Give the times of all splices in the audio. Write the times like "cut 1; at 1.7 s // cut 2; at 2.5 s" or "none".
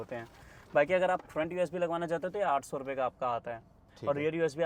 none